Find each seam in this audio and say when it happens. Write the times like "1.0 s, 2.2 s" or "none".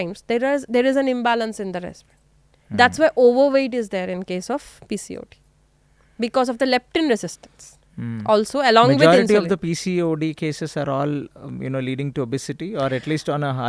none